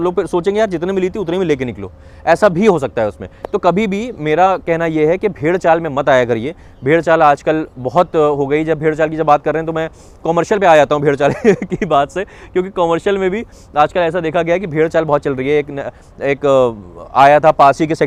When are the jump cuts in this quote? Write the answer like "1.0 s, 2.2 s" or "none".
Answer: none